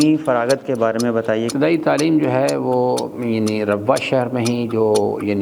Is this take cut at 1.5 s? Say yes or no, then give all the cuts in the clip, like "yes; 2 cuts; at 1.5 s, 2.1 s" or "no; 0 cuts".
yes; 1 cut; at 1.5 s